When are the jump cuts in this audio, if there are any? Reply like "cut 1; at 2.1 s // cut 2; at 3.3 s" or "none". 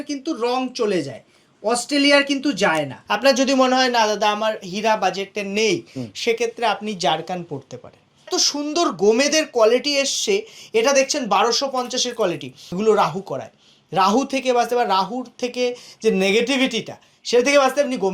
cut 1; at 3.0 s // cut 2; at 8.3 s // cut 3; at 12.6 s